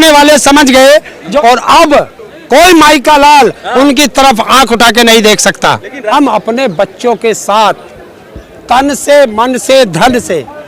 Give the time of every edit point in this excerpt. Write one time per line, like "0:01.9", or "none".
0:01.3
0:06.1